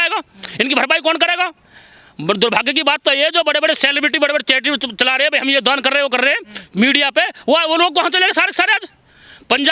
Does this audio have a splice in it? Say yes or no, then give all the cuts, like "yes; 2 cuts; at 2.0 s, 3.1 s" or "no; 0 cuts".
no; 0 cuts